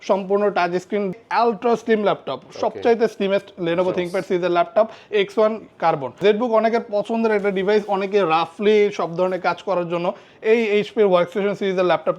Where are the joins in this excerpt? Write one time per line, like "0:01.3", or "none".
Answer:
0:01.1
0:06.1